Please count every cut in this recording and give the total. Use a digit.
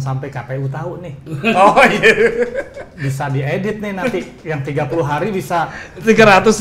0